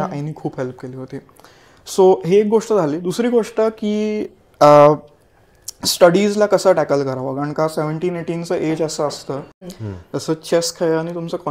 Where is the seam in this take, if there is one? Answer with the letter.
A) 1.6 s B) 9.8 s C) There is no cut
B